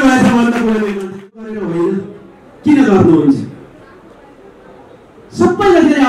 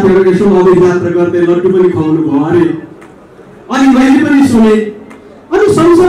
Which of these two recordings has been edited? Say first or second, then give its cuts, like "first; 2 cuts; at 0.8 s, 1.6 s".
first; 1 cut; at 1.0 s